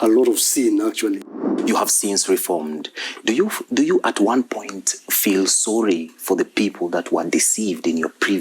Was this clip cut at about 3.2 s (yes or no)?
no